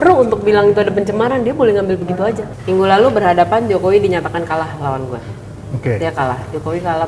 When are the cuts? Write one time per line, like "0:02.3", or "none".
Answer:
0:02.5